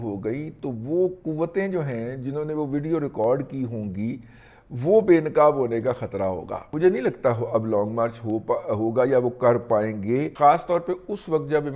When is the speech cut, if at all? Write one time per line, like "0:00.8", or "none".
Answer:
0:06.7
0:10.3